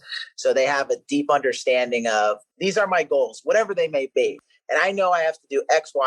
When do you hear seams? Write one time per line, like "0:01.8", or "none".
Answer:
0:02.5
0:04.2